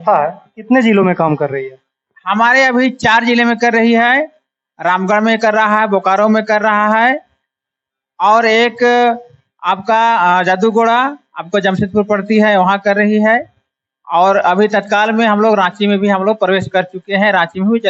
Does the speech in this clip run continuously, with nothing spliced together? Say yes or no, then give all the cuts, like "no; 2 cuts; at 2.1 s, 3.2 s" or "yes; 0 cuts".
yes; 0 cuts